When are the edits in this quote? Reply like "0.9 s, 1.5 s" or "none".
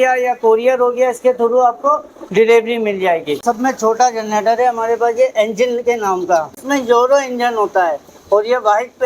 3.4 s, 6.6 s